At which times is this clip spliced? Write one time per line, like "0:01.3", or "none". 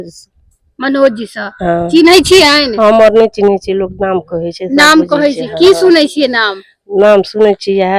none